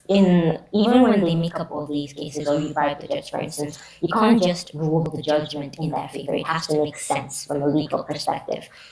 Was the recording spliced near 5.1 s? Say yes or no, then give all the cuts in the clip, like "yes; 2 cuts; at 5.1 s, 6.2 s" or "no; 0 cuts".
yes; 1 cut; at 5.1 s